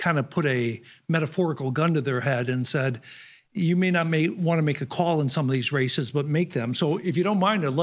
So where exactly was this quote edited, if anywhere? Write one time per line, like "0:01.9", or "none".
none

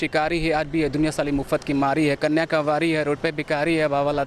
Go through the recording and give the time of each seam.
none

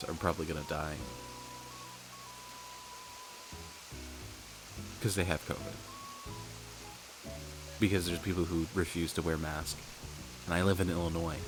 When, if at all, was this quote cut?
none

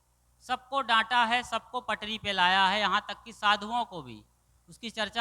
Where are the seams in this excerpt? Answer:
none

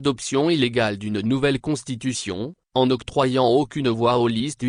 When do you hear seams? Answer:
0:02.2

